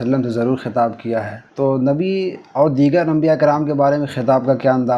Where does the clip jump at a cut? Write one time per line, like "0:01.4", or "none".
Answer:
0:01.4